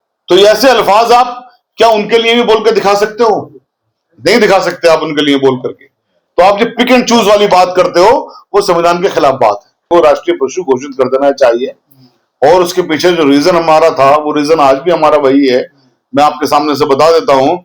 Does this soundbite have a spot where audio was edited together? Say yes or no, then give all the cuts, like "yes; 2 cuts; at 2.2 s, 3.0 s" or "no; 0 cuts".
no; 0 cuts